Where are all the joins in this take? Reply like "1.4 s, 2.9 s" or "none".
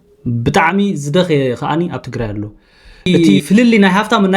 3.1 s